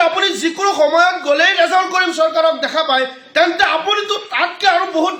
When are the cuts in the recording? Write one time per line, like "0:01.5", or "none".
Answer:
none